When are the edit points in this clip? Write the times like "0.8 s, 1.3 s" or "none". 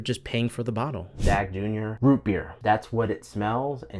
1.6 s, 2.5 s